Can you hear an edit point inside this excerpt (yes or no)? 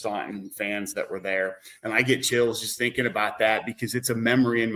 no